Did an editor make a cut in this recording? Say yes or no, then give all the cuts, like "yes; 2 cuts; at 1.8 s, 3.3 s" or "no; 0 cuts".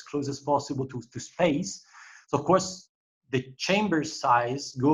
no; 0 cuts